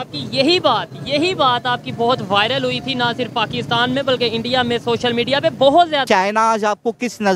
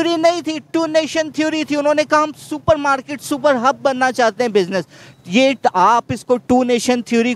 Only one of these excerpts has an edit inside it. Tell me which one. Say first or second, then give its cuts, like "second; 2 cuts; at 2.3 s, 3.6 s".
first; 1 cut; at 6.0 s